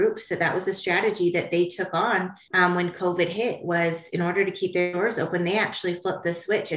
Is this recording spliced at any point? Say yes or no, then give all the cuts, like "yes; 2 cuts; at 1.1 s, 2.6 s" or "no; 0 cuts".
no; 0 cuts